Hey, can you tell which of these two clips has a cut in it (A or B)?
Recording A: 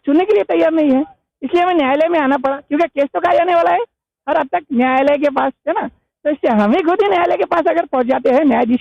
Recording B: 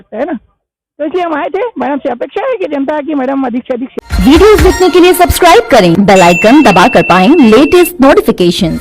B